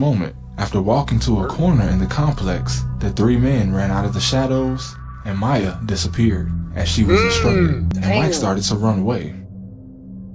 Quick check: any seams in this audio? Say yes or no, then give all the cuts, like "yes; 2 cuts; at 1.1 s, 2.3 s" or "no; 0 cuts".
yes; 1 cut; at 7.9 s